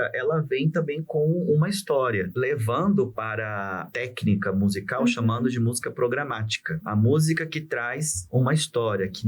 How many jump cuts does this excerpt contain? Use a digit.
3